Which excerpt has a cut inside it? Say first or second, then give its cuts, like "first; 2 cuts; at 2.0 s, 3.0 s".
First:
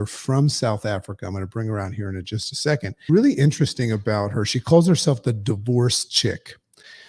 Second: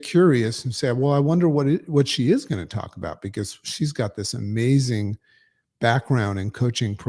first; 1 cut; at 3.0 s